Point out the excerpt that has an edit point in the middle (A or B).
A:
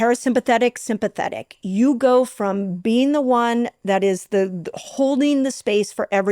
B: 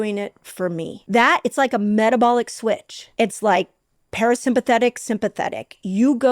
B